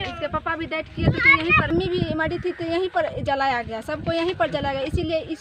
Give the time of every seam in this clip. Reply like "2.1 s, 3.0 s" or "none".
none